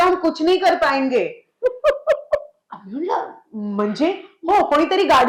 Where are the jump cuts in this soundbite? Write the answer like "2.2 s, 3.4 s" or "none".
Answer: none

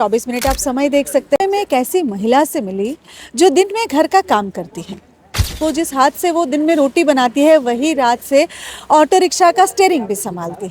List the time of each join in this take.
1.4 s, 5.5 s

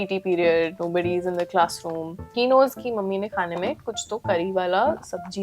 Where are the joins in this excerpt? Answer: 2.3 s

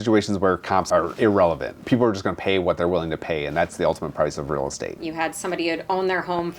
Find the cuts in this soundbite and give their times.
0.8 s, 1.8 s, 4.9 s

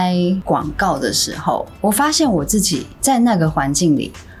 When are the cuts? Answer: none

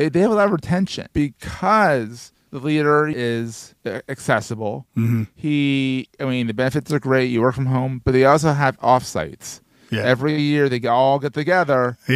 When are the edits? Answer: 1.0 s, 3.1 s

